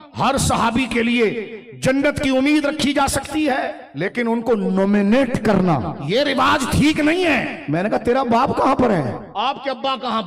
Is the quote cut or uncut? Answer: cut